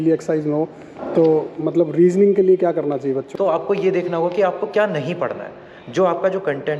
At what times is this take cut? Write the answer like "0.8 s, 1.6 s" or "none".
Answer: 3.3 s

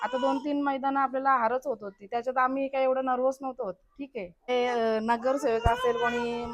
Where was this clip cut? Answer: 4.5 s

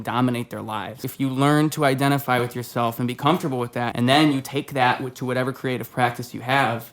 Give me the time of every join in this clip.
1.1 s, 3.9 s

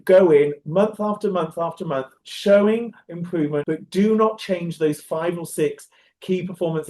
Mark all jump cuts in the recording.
3.6 s

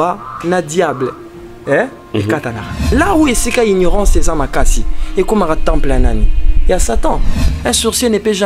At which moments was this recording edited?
2.9 s, 7.4 s

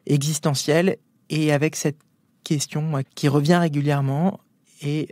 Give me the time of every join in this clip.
3.1 s

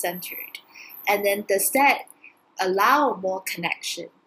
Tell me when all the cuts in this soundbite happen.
none

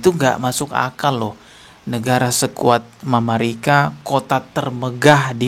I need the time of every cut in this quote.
none

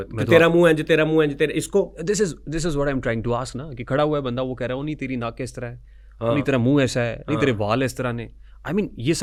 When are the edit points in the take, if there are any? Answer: none

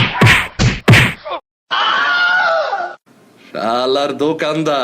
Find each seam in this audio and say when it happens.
1.2 s

